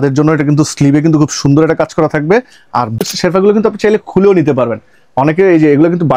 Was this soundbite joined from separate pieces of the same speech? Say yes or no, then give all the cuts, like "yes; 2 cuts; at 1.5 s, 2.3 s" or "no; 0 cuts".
yes; 1 cut; at 2.9 s